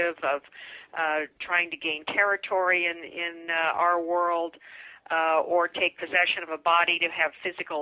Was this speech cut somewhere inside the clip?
no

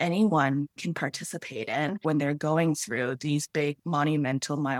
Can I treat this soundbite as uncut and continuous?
no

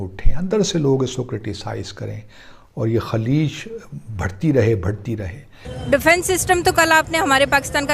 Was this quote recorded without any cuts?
no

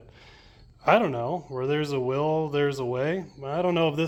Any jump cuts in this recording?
no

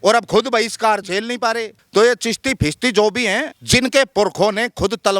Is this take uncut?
no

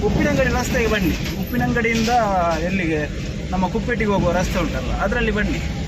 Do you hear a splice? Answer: no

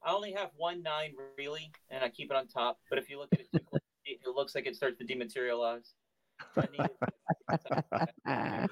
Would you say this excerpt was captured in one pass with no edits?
no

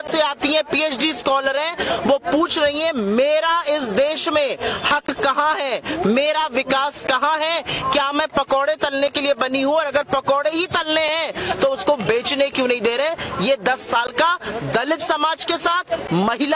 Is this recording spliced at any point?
no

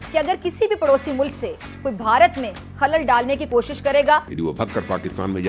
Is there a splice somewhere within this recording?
yes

